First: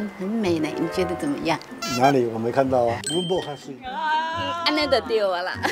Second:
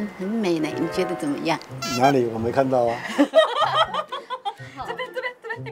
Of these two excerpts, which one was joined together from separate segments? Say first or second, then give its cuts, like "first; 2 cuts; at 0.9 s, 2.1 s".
first; 1 cut; at 3.0 s